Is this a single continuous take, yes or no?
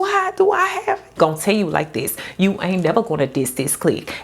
no